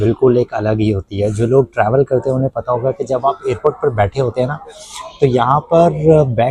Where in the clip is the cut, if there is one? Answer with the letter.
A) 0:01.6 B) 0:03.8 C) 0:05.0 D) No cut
D